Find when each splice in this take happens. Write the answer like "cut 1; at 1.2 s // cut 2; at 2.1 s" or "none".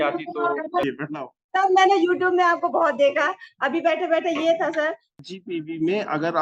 cut 1; at 0.9 s // cut 2; at 5.2 s